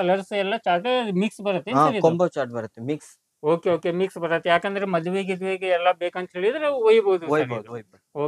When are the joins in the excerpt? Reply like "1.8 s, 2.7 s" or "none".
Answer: none